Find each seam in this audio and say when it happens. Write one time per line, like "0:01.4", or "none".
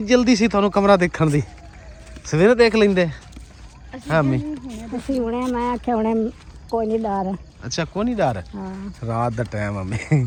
none